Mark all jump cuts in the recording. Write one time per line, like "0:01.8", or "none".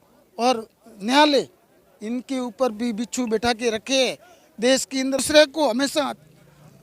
0:05.2